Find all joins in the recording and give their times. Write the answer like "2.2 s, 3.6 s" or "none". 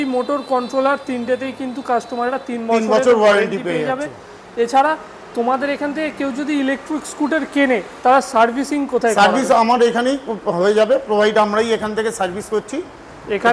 none